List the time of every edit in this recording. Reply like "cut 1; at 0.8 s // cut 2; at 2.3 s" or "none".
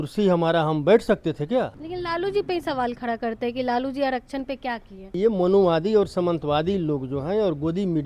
cut 1; at 1.8 s // cut 2; at 5.1 s